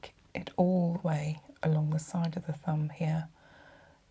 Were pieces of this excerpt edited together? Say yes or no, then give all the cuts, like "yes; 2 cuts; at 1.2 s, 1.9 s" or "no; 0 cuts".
no; 0 cuts